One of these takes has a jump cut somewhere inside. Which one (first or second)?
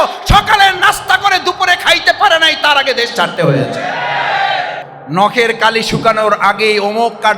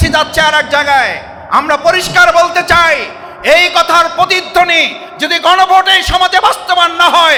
first